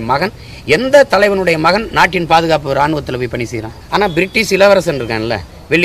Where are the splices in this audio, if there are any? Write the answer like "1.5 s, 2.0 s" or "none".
3.8 s

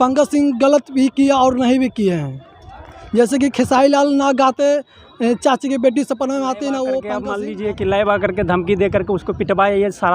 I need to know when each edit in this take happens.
7.3 s

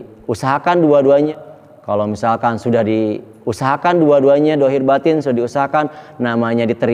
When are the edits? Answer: none

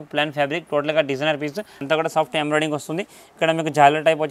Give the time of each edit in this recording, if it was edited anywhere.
1.8 s

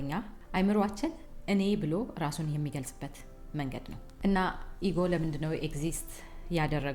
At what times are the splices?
none

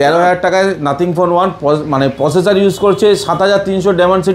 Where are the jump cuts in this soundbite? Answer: none

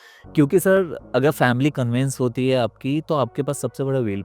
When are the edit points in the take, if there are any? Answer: none

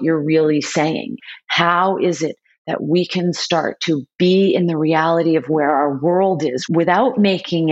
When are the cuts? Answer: 1.2 s, 6.6 s

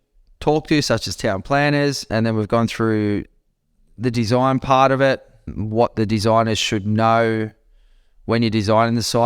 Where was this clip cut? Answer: 2.1 s, 5.5 s

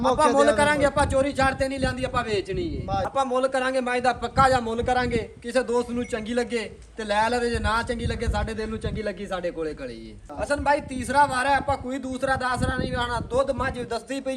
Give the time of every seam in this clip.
3.1 s, 10.2 s

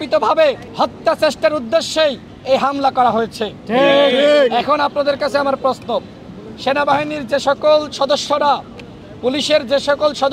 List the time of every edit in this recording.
none

